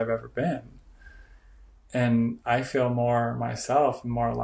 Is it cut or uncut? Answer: uncut